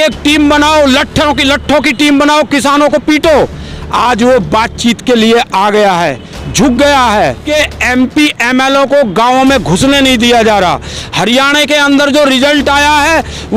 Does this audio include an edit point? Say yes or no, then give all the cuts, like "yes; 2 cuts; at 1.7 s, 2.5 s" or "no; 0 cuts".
yes; 1 cut; at 7.4 s